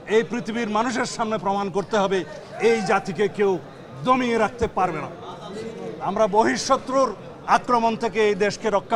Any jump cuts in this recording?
no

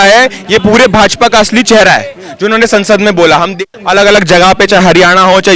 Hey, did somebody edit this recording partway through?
yes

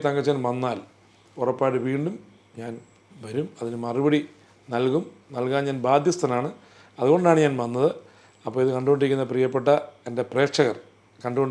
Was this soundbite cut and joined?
no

